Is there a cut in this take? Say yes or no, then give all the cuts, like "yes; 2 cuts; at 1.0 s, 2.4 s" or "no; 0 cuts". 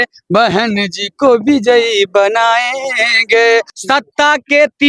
yes; 1 cut; at 3.7 s